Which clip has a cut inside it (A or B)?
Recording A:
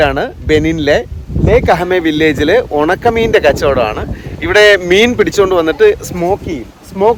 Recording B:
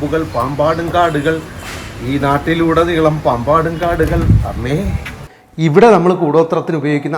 B